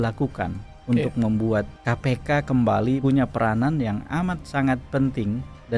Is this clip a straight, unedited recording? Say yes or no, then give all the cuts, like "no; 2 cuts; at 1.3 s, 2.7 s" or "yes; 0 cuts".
no; 2 cuts; at 1.8 s, 3.0 s